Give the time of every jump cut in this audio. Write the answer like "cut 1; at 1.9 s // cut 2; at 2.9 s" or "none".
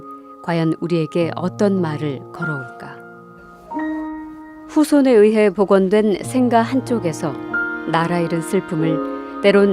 none